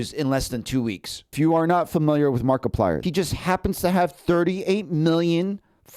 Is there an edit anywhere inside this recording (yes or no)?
yes